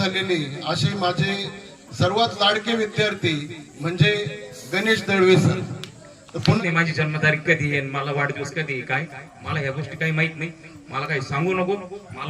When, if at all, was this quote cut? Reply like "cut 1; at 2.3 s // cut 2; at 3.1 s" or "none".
cut 1; at 6.5 s